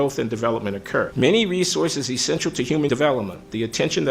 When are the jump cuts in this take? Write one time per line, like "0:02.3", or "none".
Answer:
0:01.1
0:02.9